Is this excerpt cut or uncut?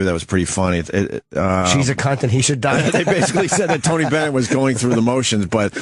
cut